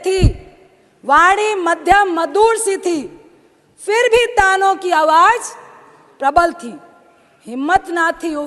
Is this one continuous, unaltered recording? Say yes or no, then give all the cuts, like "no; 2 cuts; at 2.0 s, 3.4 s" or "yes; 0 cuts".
yes; 0 cuts